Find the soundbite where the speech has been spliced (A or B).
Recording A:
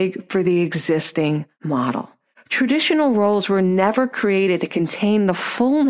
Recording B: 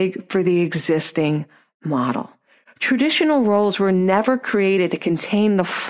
A